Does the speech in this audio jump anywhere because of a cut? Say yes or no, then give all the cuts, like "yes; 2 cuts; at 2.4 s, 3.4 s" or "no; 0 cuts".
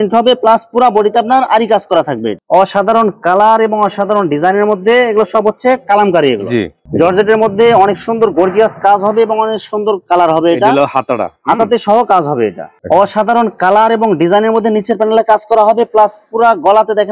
yes; 3 cuts; at 2.3 s, 6.8 s, 12.7 s